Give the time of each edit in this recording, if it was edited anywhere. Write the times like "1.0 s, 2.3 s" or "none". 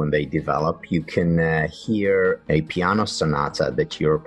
2.4 s